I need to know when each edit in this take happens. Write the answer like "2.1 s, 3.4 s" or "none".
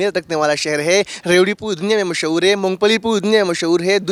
none